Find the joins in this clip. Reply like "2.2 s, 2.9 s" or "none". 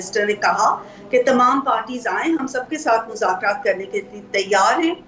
none

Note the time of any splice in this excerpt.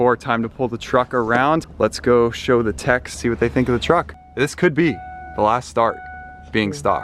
1.7 s

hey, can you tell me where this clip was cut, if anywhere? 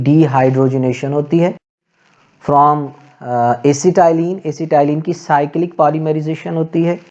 none

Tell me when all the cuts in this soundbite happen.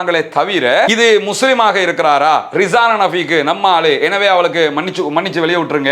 0.9 s

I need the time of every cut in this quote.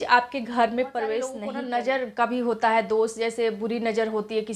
1.5 s

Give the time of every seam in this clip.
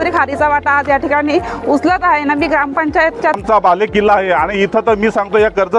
3.4 s

